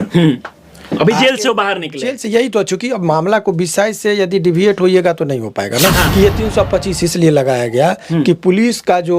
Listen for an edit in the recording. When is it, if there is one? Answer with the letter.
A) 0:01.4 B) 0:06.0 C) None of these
B